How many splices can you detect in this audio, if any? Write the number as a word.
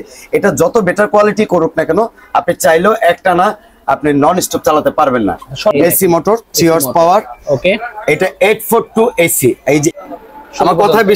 two